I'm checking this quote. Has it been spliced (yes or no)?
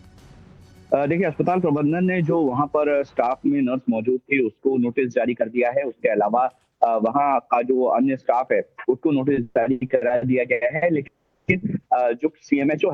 no